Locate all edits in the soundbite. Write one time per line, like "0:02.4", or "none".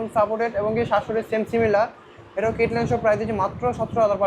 none